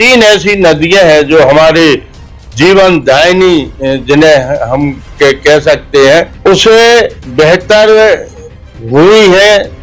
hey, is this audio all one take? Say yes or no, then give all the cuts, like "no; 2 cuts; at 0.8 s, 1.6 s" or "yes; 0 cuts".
no; 1 cut; at 6.3 s